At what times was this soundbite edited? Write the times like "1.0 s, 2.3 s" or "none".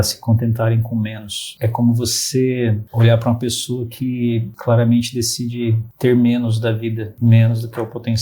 1.5 s, 2.9 s, 4.5 s, 5.9 s, 7.1 s